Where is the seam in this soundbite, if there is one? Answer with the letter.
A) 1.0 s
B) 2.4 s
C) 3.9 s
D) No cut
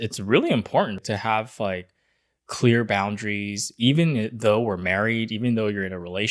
A